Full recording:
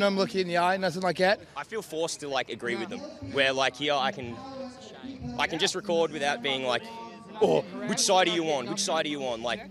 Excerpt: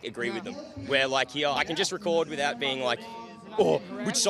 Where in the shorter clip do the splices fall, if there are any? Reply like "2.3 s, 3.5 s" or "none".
1.6 s